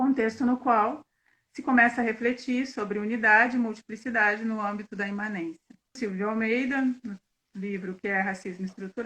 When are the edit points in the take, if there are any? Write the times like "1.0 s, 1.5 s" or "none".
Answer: 6.0 s

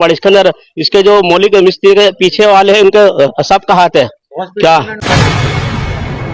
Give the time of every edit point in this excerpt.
5.0 s

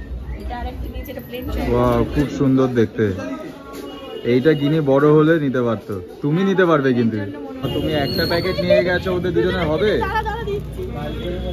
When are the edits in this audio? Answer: 1.6 s, 7.7 s

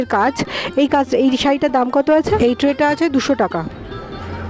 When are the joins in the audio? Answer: 2.4 s

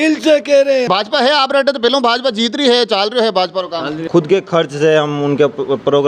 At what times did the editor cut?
0.9 s, 4.0 s

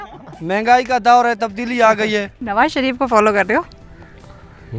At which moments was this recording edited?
2.4 s

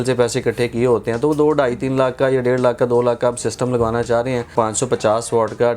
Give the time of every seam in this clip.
4.5 s

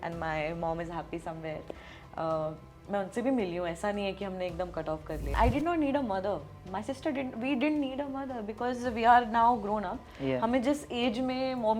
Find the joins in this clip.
5.2 s

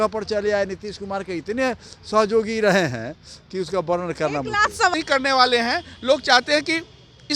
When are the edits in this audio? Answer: 4.9 s

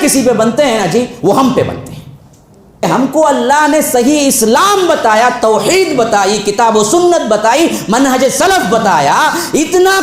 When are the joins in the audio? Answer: 2.8 s

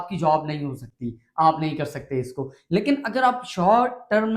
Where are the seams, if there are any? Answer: none

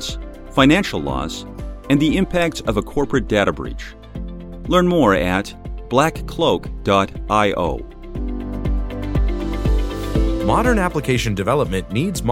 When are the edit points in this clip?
8.0 s, 10.4 s

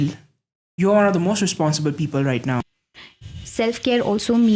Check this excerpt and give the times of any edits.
2.7 s

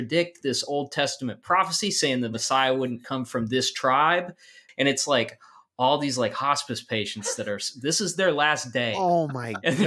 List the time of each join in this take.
4.6 s

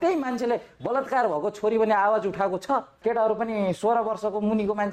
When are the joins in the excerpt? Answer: 3.0 s

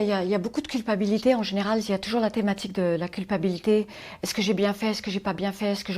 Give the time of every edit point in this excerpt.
none

